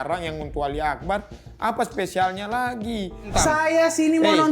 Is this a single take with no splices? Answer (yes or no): no